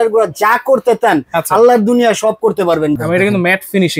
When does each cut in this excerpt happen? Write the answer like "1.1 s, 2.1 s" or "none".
3.0 s